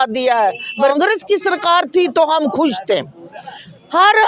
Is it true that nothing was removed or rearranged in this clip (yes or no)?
no